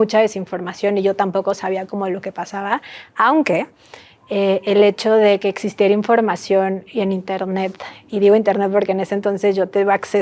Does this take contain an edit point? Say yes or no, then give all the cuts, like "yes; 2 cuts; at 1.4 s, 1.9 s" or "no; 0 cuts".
no; 0 cuts